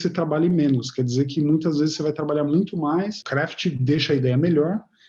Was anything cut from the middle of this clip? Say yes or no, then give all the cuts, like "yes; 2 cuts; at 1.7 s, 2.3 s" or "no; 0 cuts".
yes; 1 cut; at 3.2 s